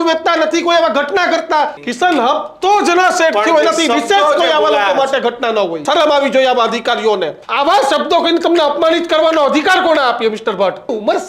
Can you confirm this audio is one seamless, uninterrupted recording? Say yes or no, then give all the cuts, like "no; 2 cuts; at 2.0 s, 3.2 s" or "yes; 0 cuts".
yes; 0 cuts